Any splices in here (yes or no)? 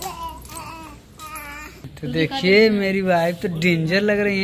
yes